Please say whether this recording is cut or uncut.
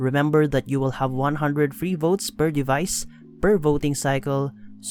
uncut